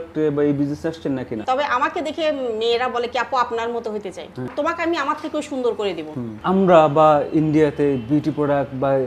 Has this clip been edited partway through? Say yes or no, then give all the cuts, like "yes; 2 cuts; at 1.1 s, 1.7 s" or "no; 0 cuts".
yes; 3 cuts; at 1.4 s, 4.5 s, 6.4 s